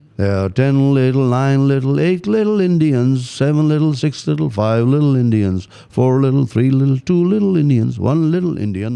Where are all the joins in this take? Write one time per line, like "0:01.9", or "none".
none